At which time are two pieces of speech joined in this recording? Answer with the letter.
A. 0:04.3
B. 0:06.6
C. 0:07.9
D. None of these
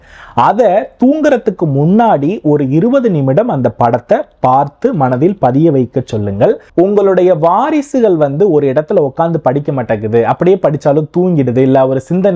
B